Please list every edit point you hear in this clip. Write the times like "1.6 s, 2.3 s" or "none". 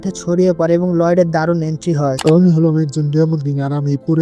2.2 s